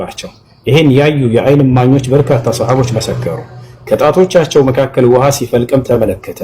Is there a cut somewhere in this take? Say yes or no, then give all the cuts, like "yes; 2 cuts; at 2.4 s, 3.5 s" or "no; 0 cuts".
no; 0 cuts